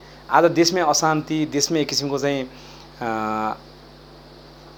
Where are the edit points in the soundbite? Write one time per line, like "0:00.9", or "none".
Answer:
none